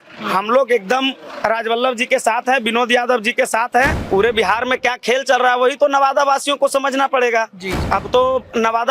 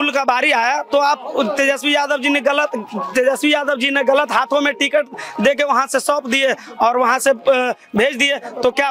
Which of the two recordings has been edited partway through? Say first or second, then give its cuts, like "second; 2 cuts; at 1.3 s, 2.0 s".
first; 2 cuts; at 4.0 s, 7.7 s